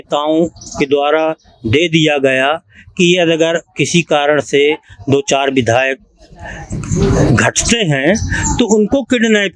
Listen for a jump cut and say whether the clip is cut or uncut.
uncut